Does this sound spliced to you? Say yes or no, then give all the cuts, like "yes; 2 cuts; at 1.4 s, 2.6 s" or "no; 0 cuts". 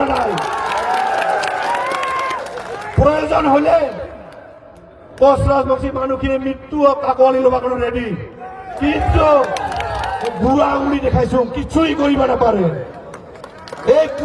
yes; 1 cut; at 10.4 s